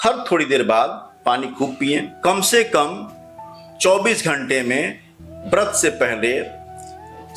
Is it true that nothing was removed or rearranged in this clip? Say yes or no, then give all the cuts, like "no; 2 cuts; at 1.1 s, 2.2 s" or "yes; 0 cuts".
no; 1 cut; at 2.1 s